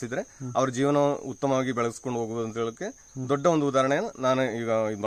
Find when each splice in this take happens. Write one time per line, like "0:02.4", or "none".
none

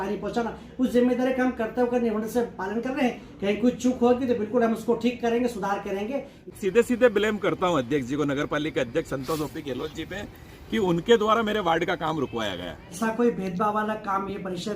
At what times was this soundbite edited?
0:06.6
0:12.8

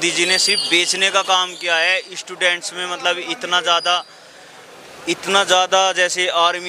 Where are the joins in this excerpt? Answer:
none

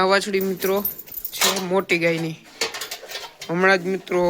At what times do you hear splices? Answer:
none

